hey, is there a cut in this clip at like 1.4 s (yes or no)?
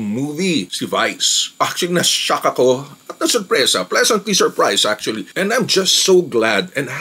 yes